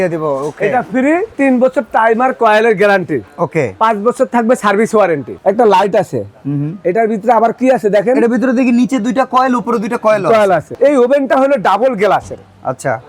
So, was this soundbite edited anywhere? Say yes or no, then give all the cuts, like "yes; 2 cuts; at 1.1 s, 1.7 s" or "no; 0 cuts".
yes; 3 cuts; at 1.3 s, 5.3 s, 10.7 s